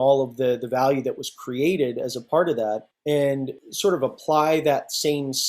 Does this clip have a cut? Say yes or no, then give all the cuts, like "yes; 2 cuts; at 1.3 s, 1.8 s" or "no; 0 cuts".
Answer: yes; 2 cuts; at 2.9 s, 3.6 s